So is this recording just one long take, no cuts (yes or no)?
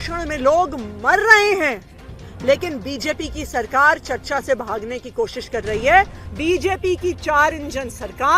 no